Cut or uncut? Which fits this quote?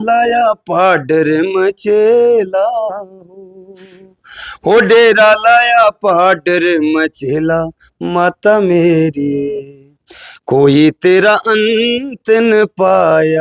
uncut